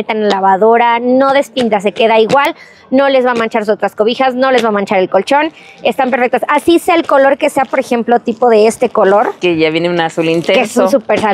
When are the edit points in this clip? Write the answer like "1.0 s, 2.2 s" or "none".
none

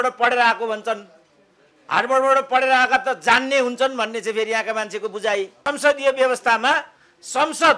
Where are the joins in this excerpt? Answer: 5.6 s

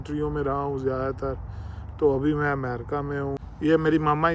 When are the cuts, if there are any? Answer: 3.5 s

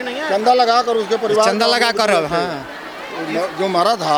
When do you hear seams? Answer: none

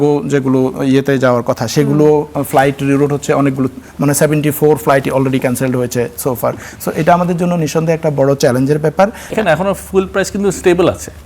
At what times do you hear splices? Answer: 9.3 s

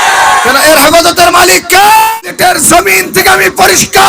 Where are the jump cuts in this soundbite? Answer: 2.2 s

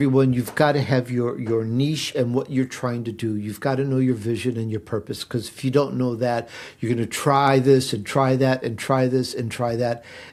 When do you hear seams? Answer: none

